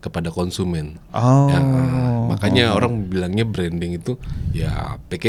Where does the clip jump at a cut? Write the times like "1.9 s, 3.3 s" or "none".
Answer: none